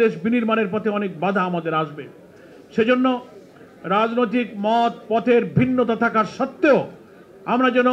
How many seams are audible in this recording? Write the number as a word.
zero